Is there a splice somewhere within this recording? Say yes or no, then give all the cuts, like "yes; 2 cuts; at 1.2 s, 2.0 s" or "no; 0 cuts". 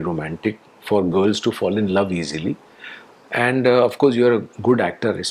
no; 0 cuts